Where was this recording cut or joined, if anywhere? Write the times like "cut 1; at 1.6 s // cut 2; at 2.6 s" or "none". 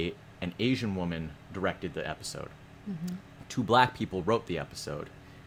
none